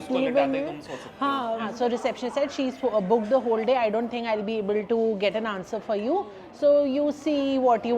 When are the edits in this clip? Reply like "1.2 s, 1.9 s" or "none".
1.6 s